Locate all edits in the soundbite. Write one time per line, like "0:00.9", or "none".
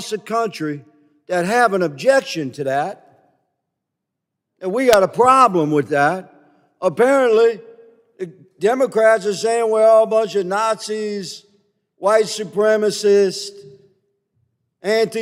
none